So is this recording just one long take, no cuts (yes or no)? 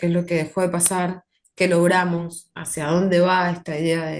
yes